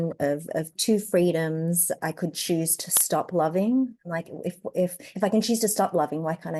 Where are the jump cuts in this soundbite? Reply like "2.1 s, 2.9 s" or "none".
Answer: 2.0 s, 4.0 s